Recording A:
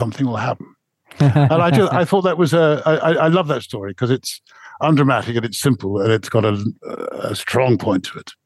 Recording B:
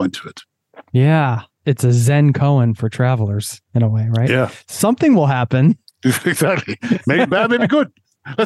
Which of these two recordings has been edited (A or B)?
B